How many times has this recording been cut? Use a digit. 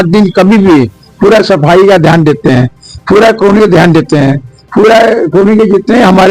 0